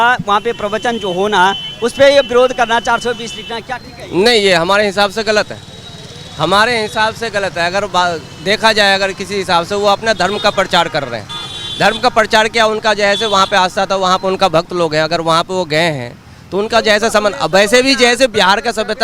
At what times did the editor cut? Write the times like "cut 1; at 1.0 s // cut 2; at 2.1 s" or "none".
none